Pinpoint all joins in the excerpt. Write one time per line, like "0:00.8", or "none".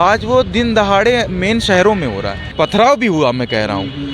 0:02.4